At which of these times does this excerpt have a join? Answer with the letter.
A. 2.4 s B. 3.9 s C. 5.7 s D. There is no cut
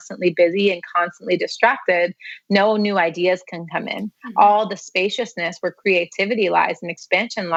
D